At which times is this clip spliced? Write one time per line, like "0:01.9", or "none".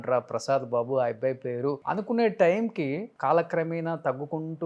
0:01.8
0:03.1